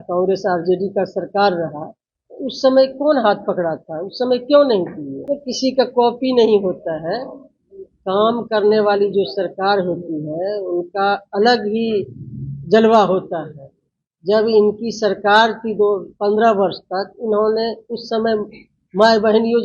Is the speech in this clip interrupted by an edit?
yes; 1 cut; at 5.1 s

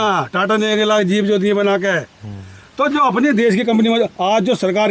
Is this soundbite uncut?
yes; 0 cuts

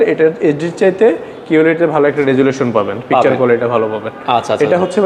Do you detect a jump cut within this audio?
no; 0 cuts

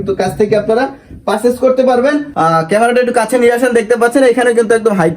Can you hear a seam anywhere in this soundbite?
yes; 1 cut; at 2.3 s

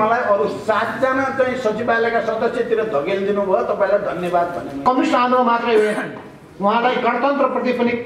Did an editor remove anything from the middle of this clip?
yes; 1 cut; at 4.8 s

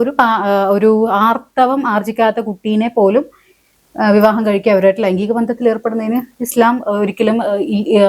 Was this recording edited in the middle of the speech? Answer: no; 0 cuts

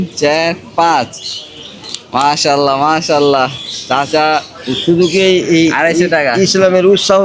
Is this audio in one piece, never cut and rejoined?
yes; 0 cuts

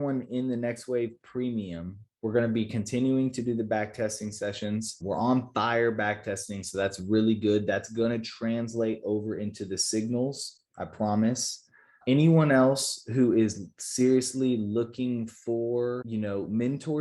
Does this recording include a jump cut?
yes; 2 cuts; at 11.9 s, 16.0 s

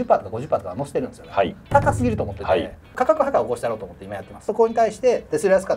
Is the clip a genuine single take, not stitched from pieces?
no; 2 cuts; at 2.9 s, 4.5 s

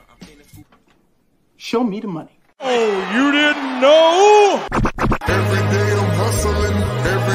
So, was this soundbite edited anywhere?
no; 0 cuts

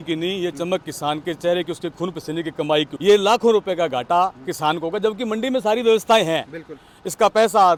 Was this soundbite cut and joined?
no; 0 cuts

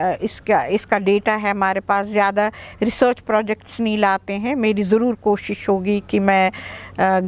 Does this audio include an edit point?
no; 0 cuts

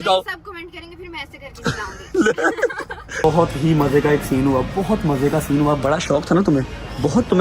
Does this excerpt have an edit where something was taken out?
yes; 1 cut; at 3.2 s

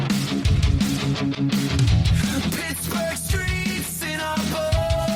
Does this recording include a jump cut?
no; 0 cuts

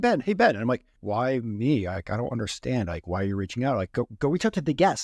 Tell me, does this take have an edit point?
yes; 1 cut; at 0.9 s

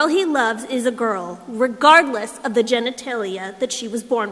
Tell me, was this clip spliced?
no; 0 cuts

